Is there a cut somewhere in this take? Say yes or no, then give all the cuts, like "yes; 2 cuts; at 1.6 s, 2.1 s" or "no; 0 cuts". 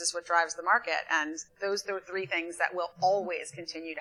no; 0 cuts